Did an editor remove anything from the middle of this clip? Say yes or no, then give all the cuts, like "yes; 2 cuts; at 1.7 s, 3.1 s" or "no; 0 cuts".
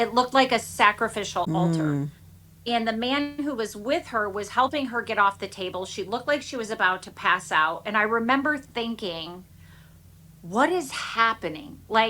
yes; 1 cut; at 1.5 s